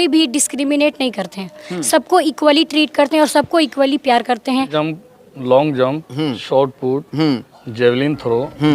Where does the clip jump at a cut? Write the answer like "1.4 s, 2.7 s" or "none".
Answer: 4.7 s